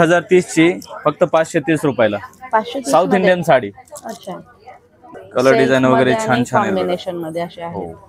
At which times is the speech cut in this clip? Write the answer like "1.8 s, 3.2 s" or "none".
5.1 s